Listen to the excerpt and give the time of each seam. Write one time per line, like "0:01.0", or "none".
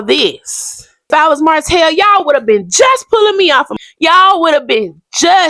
0:01.1
0:03.7